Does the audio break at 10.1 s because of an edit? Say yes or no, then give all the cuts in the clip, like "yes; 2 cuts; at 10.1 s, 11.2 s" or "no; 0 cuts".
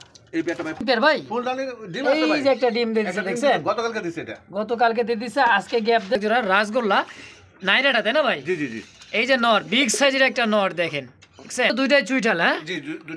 no; 3 cuts; at 0.8 s, 6.2 s, 11.7 s